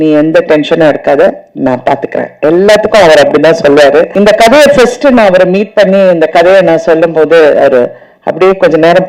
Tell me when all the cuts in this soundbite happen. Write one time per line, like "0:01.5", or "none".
0:04.1